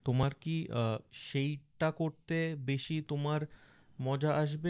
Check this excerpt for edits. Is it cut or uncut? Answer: cut